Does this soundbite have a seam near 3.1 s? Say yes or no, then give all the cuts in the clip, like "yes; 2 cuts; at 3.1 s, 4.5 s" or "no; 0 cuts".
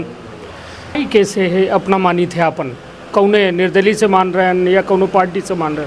no; 1 cut; at 1.0 s